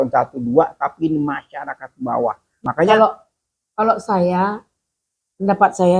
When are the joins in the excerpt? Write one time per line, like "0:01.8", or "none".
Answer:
0:02.6